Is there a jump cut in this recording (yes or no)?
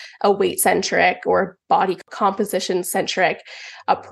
yes